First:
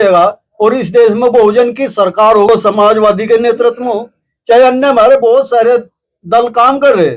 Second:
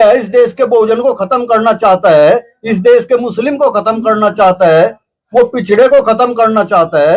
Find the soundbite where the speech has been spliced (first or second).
first